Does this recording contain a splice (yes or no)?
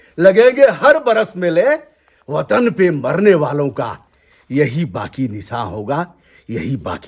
no